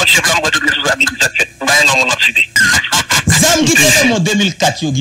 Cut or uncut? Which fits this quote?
cut